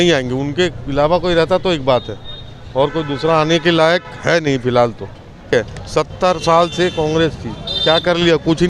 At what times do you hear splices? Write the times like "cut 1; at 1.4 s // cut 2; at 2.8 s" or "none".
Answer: cut 1; at 5.5 s